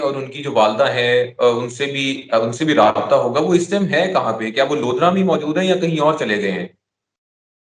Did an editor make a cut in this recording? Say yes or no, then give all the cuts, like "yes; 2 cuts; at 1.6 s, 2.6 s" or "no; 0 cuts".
no; 0 cuts